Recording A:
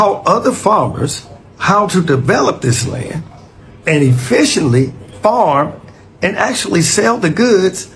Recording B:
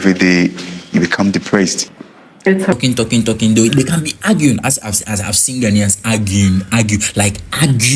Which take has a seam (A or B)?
B